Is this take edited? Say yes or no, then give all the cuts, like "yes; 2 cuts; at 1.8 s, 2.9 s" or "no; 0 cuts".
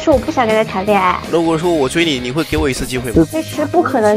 yes; 2 cuts; at 1.2 s, 3.3 s